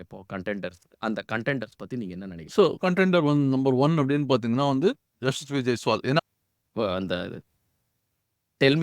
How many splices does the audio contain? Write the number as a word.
one